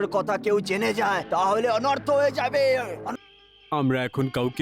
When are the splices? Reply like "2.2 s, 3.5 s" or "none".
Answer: 3.0 s